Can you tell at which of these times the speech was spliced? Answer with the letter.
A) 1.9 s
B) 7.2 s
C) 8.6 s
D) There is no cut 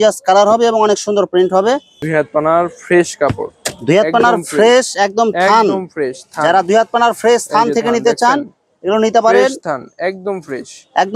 A